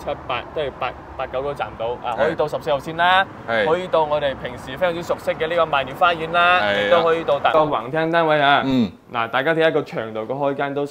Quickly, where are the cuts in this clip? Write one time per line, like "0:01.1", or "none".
0:07.5